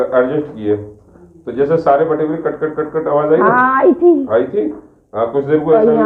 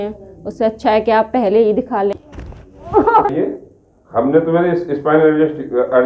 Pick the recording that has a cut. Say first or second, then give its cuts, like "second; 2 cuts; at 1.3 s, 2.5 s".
second; 1 cut; at 2.2 s